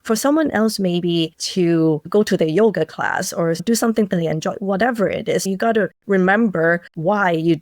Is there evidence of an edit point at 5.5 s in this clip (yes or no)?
yes